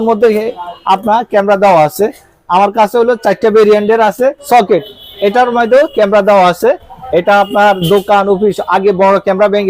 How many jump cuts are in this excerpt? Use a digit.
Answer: 1